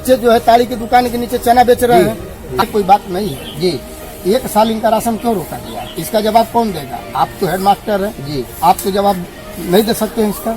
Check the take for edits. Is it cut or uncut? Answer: cut